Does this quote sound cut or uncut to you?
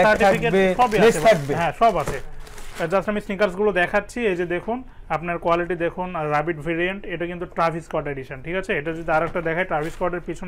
uncut